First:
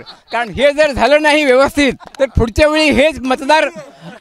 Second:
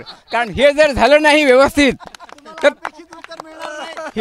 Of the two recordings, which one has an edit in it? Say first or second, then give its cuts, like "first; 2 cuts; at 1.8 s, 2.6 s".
first; 1 cut; at 2.0 s